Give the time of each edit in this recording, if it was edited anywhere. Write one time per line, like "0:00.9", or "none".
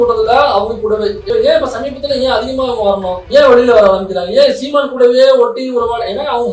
0:01.3